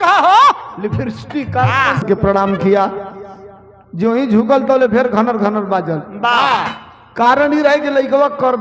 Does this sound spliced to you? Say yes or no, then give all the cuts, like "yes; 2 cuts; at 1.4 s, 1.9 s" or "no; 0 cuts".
yes; 1 cut; at 2.0 s